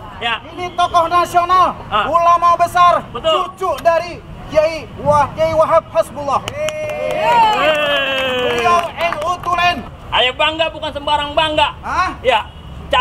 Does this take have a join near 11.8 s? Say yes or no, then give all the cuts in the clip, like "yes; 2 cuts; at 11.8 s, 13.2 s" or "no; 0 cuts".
no; 1 cut; at 9.9 s